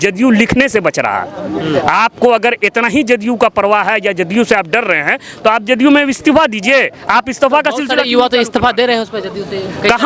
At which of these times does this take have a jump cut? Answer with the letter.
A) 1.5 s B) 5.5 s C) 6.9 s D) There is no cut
D